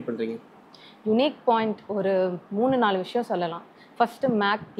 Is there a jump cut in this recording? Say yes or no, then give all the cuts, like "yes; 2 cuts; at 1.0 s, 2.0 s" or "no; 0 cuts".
no; 0 cuts